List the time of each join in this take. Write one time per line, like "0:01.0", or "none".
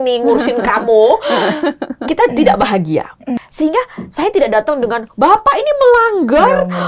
0:03.4